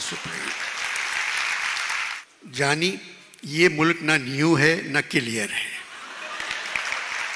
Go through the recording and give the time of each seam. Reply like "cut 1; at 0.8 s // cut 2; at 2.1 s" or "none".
cut 1; at 2.1 s